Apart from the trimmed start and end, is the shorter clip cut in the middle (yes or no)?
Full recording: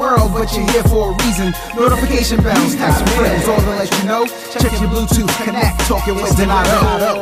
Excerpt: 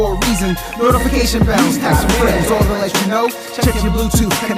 no